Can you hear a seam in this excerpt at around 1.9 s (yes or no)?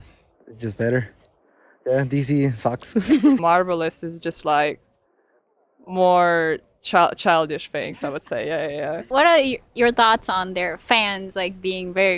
no